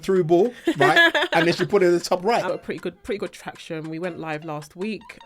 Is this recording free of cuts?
no; 1 cut; at 2.5 s

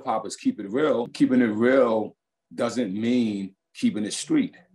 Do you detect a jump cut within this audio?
yes; 1 cut; at 1.1 s

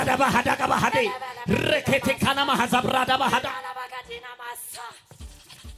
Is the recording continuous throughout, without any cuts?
yes; 0 cuts

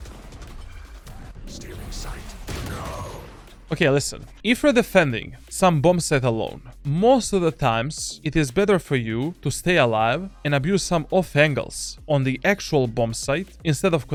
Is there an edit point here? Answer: no; 0 cuts

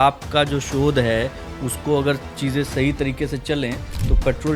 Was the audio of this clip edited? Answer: no; 0 cuts

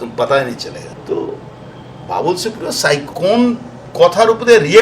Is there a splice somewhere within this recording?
yes; 2 cuts; at 0.9 s, 3.1 s

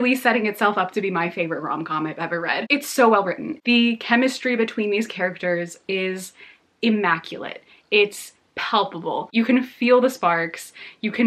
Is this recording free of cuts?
yes; 0 cuts

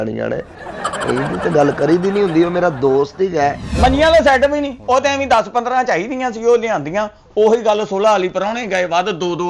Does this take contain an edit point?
yes; 1 cut; at 3.7 s

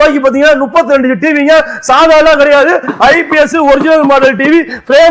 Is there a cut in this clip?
no; 0 cuts

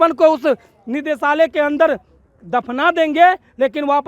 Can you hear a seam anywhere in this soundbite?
no; 0 cuts

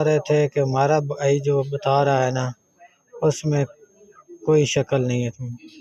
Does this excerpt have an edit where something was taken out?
no; 0 cuts

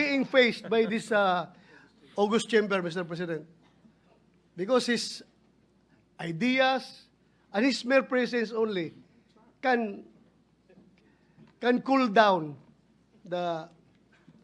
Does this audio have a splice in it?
no; 0 cuts

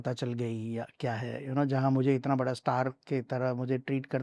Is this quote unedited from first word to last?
yes; 0 cuts

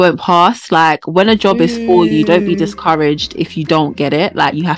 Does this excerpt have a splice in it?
no; 0 cuts

